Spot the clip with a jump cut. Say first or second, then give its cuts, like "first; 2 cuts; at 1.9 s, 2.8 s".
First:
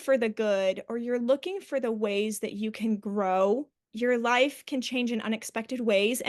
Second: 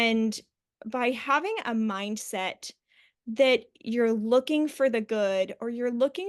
first; 1 cut; at 3.8 s